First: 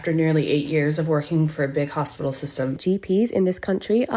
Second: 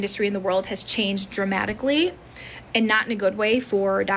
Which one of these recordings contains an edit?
first; 1 cut; at 2.8 s

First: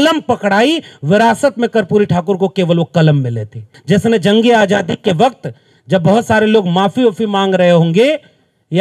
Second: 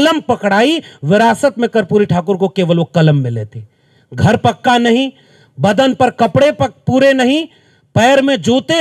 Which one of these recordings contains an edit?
first; 1 cut; at 3.7 s

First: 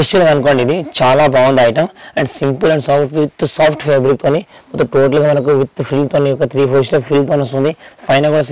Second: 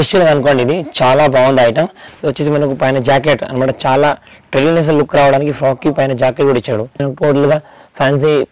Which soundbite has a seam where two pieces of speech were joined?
second; 2 cuts; at 2.0 s, 7.1 s

